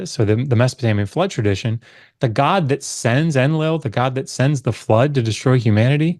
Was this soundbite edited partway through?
no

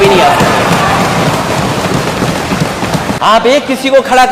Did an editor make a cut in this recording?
yes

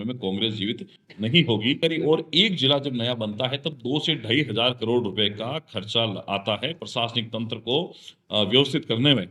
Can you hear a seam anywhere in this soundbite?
yes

